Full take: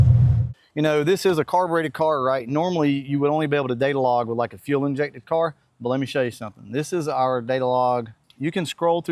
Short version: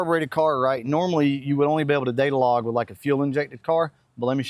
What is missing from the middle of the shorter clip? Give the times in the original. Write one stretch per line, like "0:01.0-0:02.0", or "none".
none